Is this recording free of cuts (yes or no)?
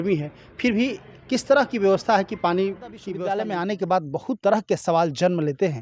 no